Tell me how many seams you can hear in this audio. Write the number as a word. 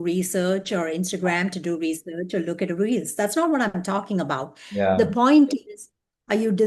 zero